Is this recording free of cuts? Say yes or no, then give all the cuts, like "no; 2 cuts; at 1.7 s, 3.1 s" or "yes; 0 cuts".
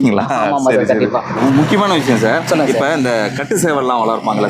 no; 1 cut; at 1.3 s